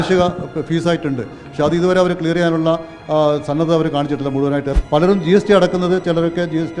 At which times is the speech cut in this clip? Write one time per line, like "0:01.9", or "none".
0:04.7